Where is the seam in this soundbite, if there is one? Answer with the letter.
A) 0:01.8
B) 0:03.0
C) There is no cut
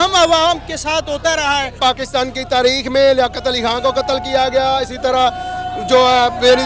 A